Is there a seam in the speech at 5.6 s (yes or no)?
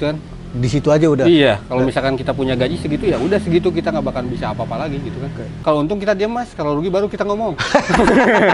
yes